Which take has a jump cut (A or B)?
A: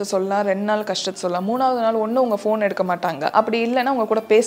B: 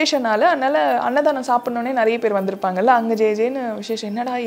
A